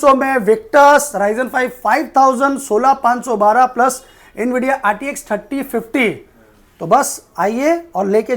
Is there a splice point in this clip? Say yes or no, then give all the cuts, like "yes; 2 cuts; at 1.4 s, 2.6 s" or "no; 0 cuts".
no; 0 cuts